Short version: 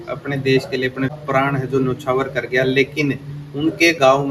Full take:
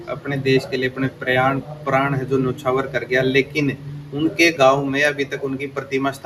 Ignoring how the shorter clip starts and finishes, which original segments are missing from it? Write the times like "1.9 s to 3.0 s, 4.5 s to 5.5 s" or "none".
1.2 s to 1.7 s